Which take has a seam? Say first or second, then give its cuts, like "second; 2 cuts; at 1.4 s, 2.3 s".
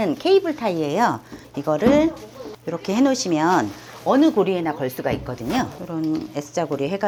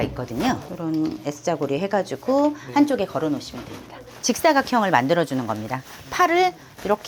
second; 1 cut; at 4.1 s